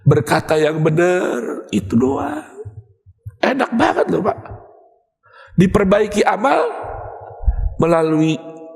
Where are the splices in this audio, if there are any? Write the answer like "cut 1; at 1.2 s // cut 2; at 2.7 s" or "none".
none